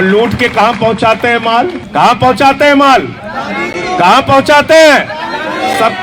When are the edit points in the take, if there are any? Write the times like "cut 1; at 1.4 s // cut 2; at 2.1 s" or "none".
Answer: cut 1; at 1.8 s